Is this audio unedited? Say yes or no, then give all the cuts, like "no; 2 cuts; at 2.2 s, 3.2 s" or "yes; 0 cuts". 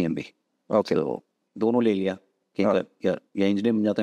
yes; 0 cuts